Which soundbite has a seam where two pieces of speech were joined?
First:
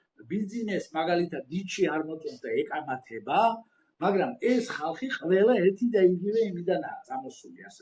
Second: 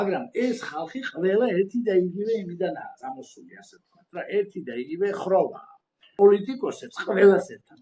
second; 1 cut; at 6.1 s

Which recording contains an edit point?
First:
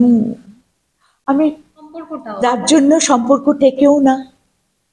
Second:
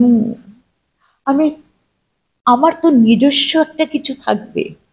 first; 1 cut; at 2.2 s

